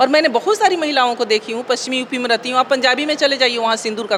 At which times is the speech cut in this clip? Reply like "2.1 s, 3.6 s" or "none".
none